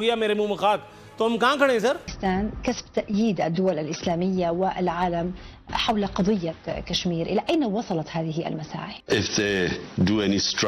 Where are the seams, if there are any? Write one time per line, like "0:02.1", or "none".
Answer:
0:02.1
0:08.9